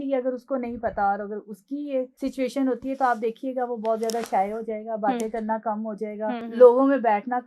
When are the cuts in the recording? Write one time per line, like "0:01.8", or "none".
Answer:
0:02.1
0:06.4